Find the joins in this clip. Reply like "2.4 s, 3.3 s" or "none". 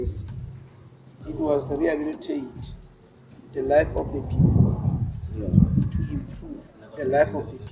none